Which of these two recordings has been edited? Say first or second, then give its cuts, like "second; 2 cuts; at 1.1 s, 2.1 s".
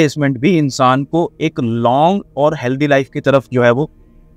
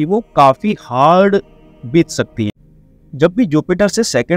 second; 1 cut; at 2.6 s